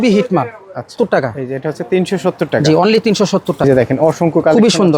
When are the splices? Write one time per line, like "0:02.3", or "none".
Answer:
0:00.9
0:03.6